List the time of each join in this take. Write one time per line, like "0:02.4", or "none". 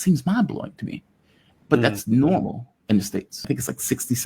0:03.3